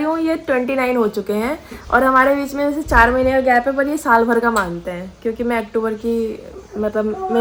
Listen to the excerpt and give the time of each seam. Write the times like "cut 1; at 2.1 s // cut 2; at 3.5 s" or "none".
none